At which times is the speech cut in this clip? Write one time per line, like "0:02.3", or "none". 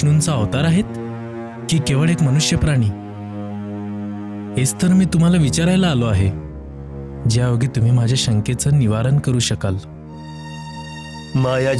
none